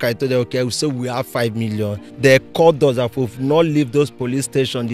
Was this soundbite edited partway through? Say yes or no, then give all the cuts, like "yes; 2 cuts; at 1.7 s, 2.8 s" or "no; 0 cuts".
yes; 1 cut; at 2.1 s